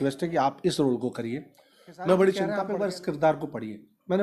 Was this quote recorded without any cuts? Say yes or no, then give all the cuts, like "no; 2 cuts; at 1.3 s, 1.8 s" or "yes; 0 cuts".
no; 1 cut; at 2.6 s